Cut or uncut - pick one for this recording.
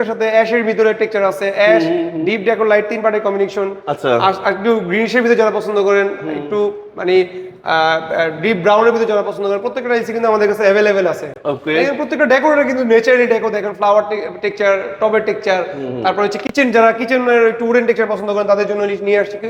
uncut